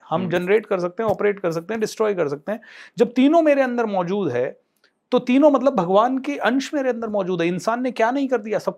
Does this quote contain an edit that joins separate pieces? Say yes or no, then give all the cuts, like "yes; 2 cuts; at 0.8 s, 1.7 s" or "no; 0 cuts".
no; 0 cuts